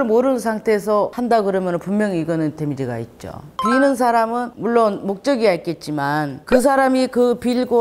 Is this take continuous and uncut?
no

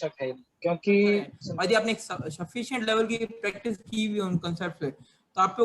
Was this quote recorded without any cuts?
no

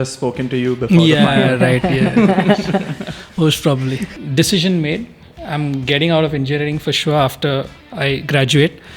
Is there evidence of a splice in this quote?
yes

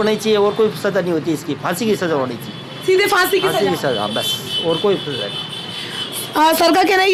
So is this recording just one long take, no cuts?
yes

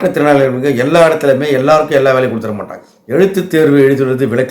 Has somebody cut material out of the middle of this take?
yes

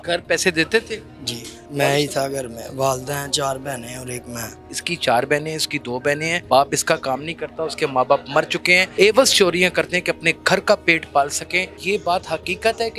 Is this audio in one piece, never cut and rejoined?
no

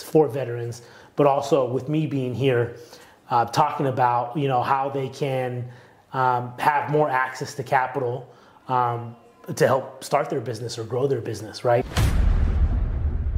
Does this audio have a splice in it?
yes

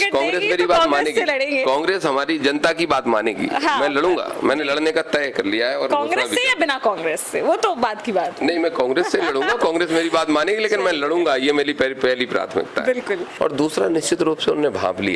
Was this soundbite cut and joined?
yes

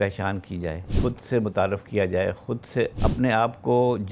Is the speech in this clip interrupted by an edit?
yes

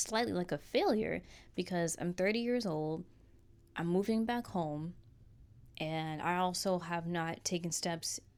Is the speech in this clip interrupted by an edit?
no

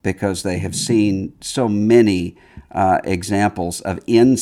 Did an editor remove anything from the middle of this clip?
no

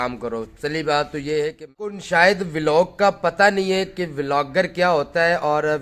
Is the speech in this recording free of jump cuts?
no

